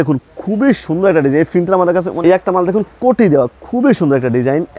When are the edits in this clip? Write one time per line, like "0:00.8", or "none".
0:02.1